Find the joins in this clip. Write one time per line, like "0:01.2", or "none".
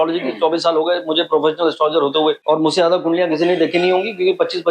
0:02.4